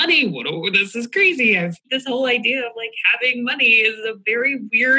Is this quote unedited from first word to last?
no; 1 cut; at 1.8 s

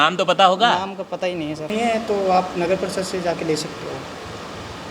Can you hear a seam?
yes; 1 cut; at 1.7 s

